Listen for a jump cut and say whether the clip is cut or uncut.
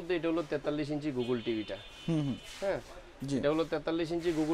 uncut